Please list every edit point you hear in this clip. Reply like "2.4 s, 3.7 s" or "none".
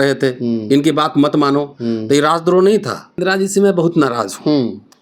3.2 s